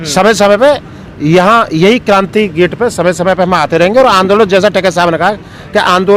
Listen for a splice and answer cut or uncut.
uncut